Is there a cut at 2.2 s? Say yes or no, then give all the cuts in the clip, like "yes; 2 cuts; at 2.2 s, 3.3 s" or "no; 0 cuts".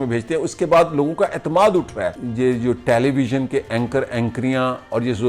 yes; 1 cut; at 2.2 s